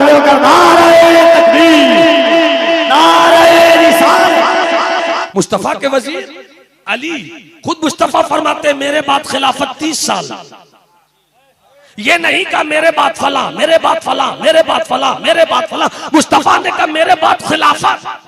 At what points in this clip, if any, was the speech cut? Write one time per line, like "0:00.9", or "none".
0:05.2